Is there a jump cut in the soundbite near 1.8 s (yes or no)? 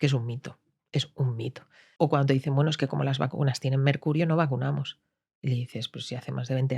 yes